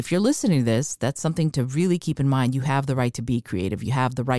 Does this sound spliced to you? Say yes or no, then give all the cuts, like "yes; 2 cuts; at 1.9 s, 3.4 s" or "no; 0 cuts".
no; 0 cuts